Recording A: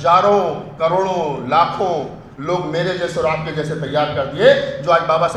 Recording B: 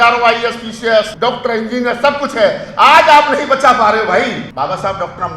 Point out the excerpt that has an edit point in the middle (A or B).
B